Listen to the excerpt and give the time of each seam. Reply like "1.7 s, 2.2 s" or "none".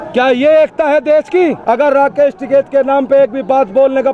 1.6 s